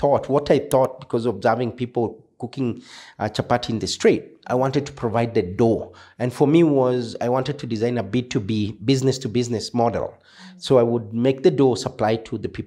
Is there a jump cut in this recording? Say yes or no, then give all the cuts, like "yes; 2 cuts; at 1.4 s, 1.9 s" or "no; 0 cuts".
no; 0 cuts